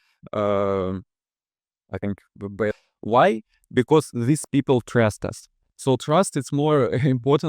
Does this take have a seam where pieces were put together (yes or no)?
yes